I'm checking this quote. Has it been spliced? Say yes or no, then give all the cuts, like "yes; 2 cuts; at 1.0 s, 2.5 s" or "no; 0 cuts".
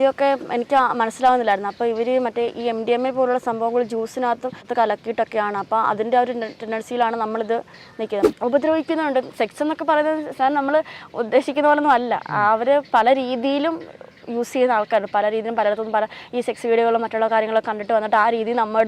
yes; 2 cuts; at 4.7 s, 8.3 s